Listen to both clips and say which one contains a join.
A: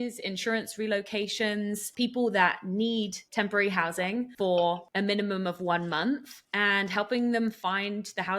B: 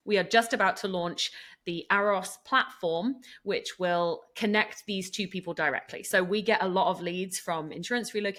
A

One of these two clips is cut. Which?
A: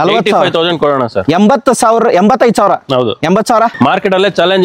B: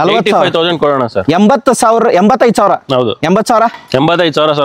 A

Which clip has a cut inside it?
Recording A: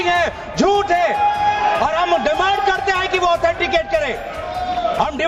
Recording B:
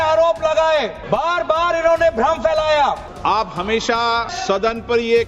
B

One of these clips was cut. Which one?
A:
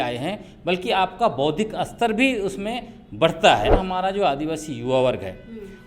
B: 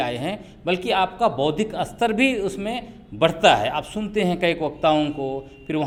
A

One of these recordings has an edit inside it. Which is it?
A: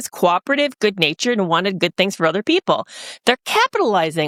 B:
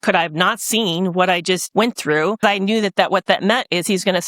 B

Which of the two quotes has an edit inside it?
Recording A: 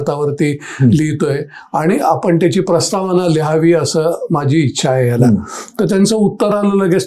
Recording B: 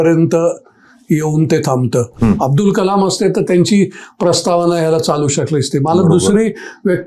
B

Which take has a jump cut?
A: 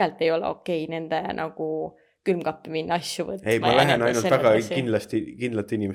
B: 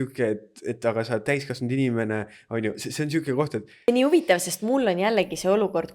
B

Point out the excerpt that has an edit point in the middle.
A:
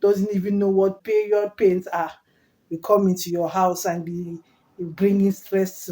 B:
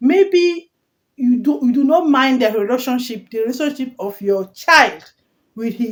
A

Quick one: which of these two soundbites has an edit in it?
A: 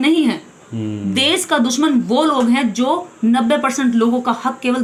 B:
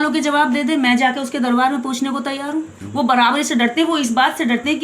B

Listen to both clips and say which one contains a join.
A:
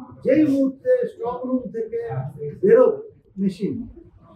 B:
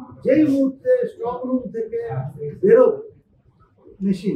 A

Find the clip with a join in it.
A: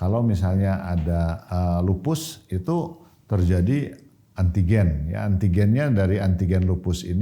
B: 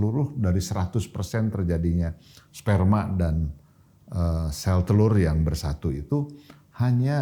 A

